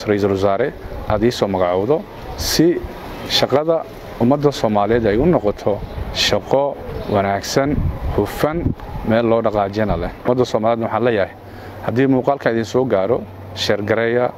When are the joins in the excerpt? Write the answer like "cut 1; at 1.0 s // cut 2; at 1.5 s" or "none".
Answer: cut 1; at 10.3 s